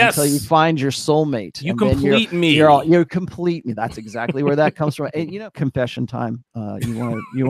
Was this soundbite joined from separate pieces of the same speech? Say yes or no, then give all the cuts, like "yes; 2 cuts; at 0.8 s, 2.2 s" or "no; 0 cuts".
yes; 1 cut; at 5.3 s